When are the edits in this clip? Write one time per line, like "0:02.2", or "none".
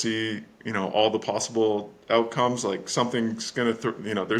none